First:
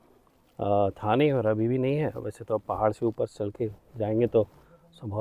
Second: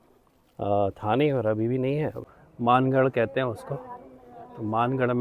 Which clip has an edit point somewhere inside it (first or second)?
second